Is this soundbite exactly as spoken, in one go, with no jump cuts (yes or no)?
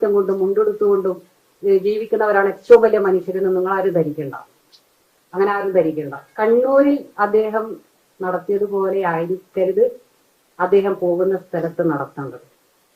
no